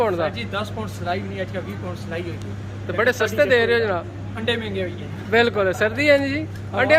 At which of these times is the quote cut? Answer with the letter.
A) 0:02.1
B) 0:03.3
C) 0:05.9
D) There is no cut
D